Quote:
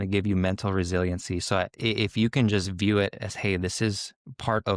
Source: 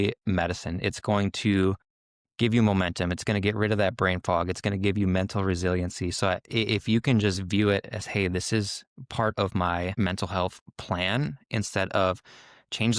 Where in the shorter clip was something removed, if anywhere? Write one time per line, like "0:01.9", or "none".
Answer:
none